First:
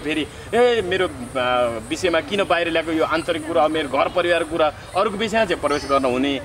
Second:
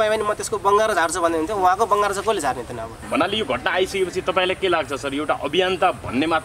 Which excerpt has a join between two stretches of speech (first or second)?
second